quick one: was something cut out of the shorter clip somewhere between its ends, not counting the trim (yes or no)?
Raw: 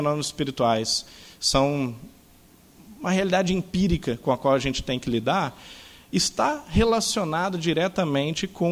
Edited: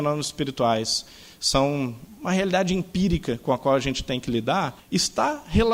yes